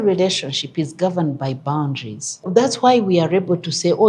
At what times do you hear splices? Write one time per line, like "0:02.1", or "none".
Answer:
0:02.4

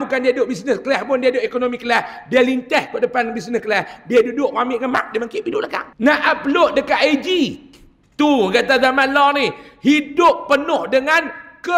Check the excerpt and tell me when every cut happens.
0:05.8

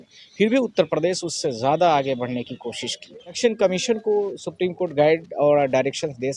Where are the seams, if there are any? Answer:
0:03.4

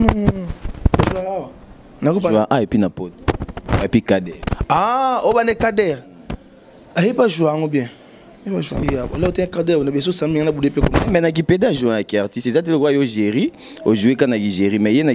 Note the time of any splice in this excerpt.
0:08.8

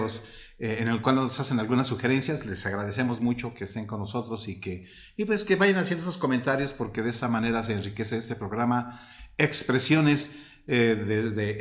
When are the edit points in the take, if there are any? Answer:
none

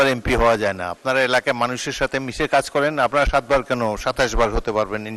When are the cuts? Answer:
none

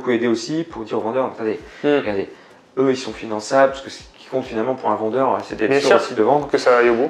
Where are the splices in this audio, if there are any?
none

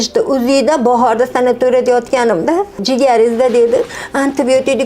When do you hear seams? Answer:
0:02.8

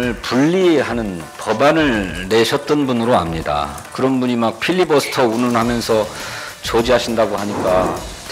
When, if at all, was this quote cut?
0:03.8

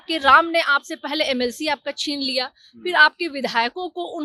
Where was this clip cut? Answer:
none

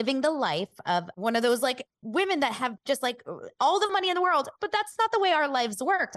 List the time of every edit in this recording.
0:01.1
0:01.9

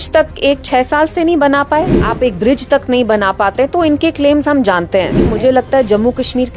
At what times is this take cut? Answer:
0:02.0
0:05.3

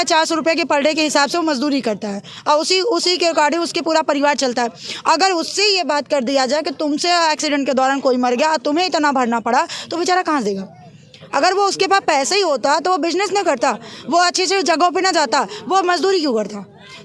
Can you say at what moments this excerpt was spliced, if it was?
none

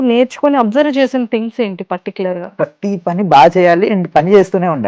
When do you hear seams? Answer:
0:02.4

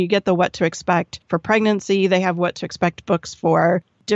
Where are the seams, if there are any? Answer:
0:01.2

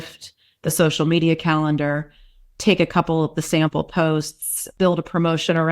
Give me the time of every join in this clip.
0:04.6

